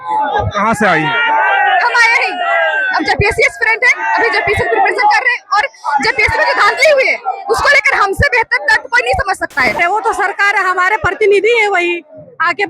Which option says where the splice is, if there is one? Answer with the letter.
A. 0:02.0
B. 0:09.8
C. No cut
B